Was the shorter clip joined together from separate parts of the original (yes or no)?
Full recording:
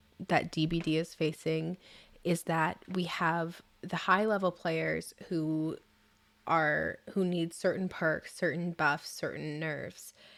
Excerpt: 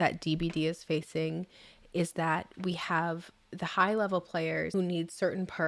yes